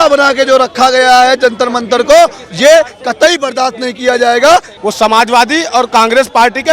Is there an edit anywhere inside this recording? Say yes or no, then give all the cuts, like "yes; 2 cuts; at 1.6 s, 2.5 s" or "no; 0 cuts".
yes; 1 cut; at 4.7 s